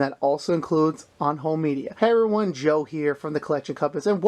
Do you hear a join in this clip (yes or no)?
yes